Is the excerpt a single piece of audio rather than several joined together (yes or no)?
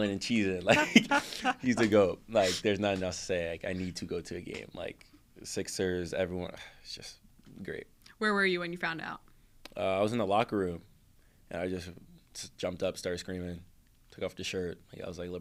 yes